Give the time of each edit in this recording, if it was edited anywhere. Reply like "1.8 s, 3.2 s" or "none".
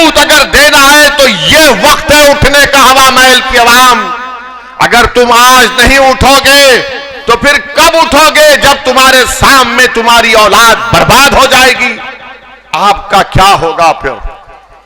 12.6 s